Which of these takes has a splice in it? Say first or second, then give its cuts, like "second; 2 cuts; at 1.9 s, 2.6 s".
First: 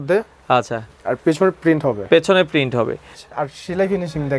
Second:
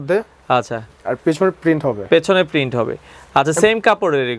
first; 1 cut; at 3.2 s